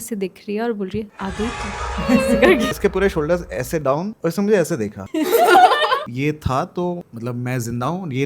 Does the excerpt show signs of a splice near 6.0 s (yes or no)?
yes